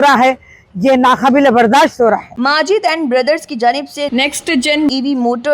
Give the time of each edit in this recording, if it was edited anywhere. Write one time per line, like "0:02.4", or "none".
0:02.3